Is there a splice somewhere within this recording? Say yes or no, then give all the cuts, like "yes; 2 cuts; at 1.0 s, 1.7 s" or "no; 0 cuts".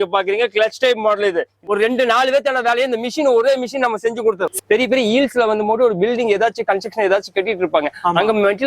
yes; 2 cuts; at 1.6 s, 4.5 s